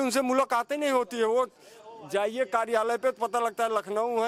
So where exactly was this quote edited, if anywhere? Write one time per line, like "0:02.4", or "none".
none